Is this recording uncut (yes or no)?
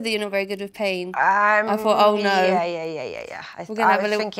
yes